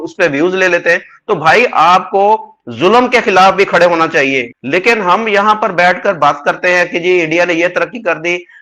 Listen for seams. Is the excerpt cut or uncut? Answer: cut